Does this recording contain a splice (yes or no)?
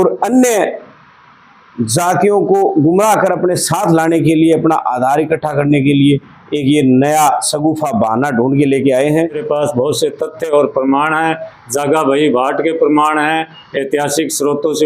yes